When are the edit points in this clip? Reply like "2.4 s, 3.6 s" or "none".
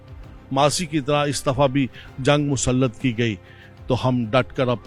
none